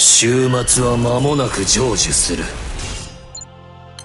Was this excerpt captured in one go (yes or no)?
yes